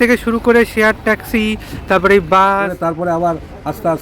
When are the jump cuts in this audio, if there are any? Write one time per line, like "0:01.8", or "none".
0:02.7